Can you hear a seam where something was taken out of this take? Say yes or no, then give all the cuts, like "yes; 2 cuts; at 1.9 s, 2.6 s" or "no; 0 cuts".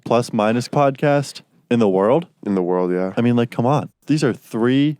yes; 2 cuts; at 2.3 s, 3.9 s